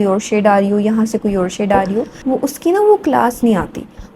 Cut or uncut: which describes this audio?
cut